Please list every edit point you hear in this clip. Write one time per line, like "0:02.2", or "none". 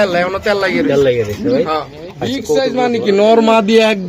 0:02.6